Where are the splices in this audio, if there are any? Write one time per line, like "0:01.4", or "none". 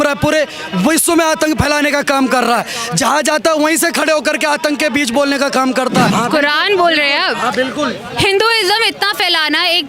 0:06.1